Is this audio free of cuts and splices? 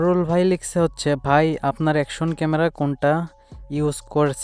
yes; 0 cuts

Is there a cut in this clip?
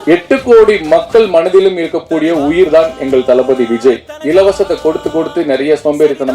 yes; 1 cut; at 4.1 s

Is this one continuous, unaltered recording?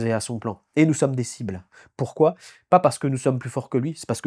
yes; 0 cuts

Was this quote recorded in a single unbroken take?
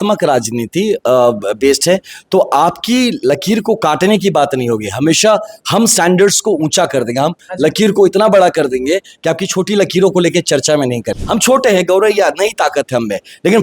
no; 1 cut; at 11.1 s

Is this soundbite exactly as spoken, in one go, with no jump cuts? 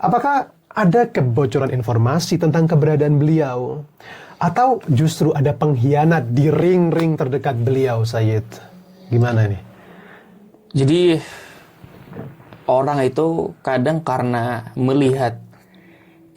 yes; 0 cuts

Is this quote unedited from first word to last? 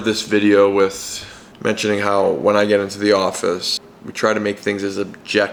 yes; 0 cuts

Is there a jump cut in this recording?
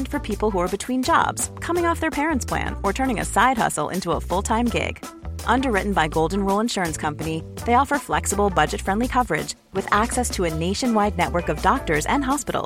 no; 0 cuts

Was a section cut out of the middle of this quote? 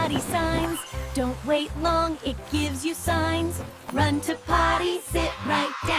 no; 0 cuts

